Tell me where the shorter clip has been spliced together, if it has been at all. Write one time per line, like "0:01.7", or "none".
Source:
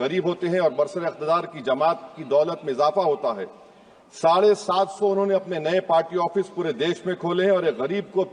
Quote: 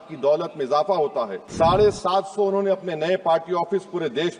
0:01.4